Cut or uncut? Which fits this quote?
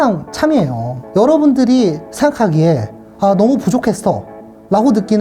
cut